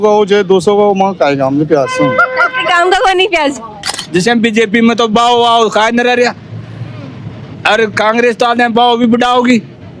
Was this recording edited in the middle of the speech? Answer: yes; 1 cut; at 4.0 s

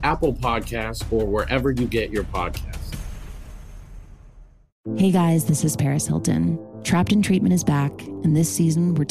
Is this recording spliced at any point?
no; 0 cuts

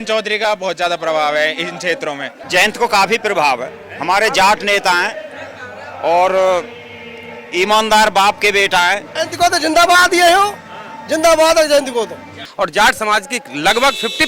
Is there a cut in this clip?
yes; 3 cuts; at 2.4 s, 9.2 s, 12.4 s

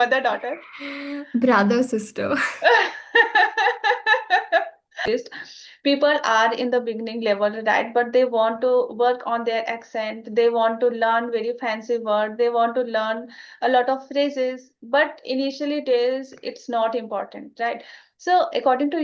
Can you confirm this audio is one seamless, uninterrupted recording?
no; 1 cut; at 5.0 s

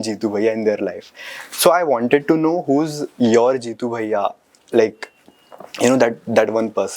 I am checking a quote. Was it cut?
no; 0 cuts

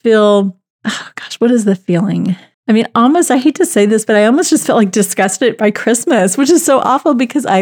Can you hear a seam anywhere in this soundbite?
no; 0 cuts

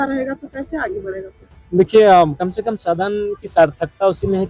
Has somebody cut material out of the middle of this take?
no; 0 cuts

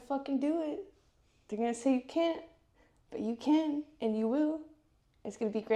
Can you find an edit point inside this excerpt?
no; 0 cuts

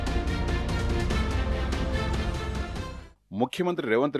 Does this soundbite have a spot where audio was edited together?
yes; 1 cut; at 2.5 s

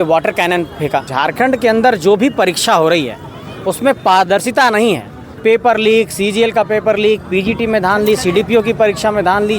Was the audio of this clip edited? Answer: yes; 2 cuts; at 1.1 s, 5.3 s

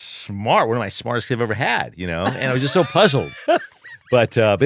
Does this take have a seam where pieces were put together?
no; 0 cuts

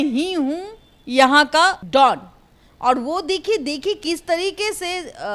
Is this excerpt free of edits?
yes; 0 cuts

